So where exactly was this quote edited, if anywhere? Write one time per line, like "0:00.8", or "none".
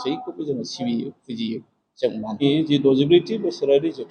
0:02.4